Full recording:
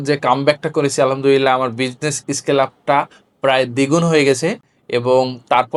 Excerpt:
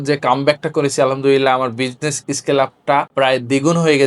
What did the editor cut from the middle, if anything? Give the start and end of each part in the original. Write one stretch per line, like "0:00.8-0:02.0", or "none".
0:03.1-0:03.4